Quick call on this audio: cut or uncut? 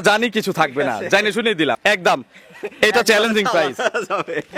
cut